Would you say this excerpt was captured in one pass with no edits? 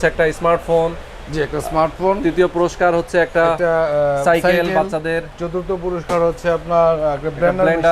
yes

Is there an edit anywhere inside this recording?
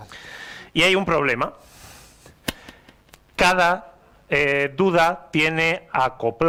no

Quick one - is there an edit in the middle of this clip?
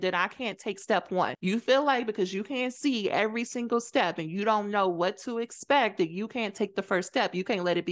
no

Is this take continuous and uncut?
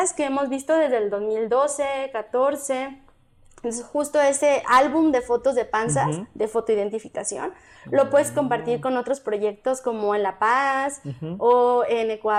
yes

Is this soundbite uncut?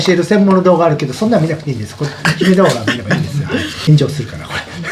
yes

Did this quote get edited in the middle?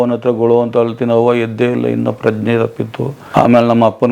yes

